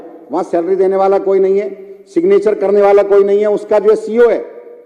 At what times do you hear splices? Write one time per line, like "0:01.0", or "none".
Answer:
none